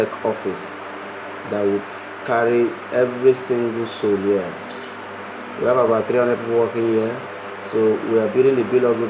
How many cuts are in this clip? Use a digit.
0